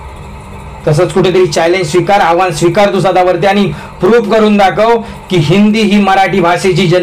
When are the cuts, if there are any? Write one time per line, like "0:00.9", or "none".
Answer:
none